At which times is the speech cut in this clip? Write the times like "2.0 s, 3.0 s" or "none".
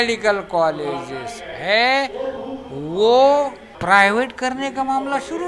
3.7 s